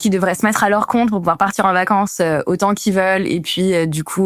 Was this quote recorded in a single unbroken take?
yes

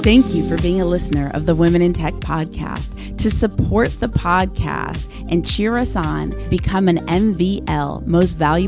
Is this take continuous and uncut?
yes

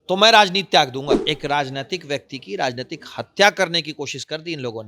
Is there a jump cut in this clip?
yes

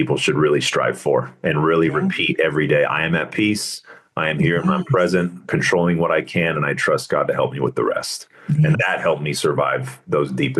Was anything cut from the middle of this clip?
yes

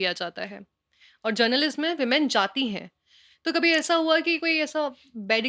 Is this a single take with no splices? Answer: yes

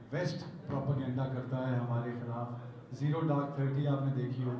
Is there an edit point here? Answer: no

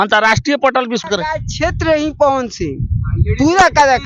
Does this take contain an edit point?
yes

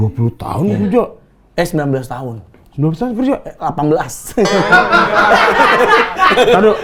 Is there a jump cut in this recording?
no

